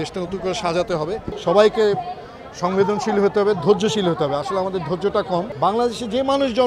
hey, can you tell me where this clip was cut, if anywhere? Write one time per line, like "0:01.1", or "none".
0:01.3
0:05.5